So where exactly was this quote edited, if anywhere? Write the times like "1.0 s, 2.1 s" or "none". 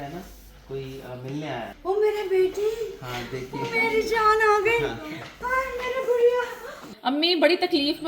1.8 s, 6.9 s